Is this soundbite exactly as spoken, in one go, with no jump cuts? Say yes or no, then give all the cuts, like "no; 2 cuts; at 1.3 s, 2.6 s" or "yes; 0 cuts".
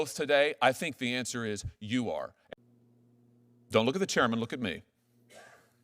no; 1 cut; at 2.4 s